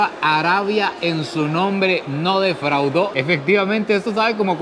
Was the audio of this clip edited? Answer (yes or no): no